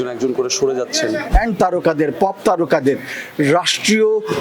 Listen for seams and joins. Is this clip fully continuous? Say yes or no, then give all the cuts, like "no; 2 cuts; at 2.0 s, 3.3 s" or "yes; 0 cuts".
no; 1 cut; at 1.3 s